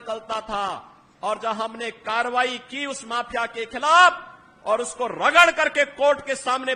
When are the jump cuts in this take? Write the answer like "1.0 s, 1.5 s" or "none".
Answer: none